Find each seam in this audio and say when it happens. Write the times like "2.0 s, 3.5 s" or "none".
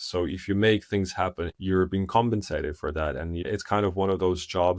1.5 s, 3.4 s